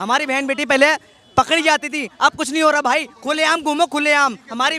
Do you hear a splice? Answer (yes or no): no